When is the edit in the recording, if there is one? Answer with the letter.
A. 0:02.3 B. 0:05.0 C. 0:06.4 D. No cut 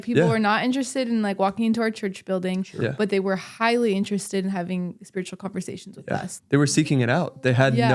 C